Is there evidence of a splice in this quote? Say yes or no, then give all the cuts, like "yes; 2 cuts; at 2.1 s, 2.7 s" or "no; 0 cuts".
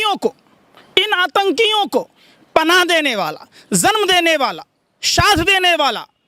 no; 0 cuts